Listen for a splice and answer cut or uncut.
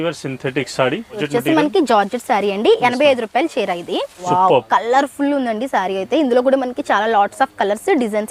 cut